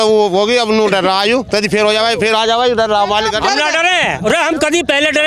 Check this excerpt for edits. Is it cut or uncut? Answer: uncut